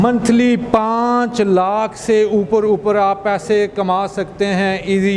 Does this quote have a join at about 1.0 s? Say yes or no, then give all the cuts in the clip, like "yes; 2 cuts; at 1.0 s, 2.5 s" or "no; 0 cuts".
no; 0 cuts